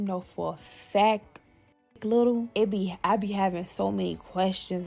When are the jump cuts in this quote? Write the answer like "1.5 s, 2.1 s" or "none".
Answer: 2.5 s